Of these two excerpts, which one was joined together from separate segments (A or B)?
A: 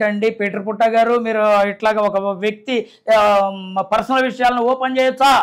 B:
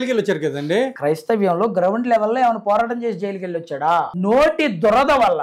B